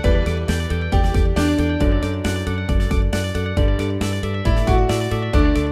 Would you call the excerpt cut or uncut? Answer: uncut